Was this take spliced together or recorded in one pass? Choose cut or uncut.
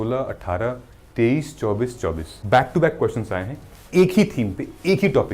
cut